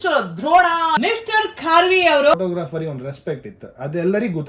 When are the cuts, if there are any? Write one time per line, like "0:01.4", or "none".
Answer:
0:01.0
0:02.3